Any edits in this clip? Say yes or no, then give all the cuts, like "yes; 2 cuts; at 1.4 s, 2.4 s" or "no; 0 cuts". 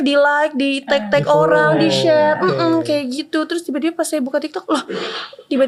no; 0 cuts